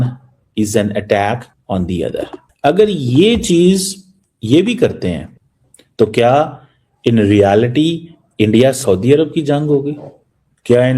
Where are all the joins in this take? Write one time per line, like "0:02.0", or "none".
0:05.3